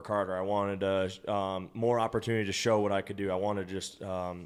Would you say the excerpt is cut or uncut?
uncut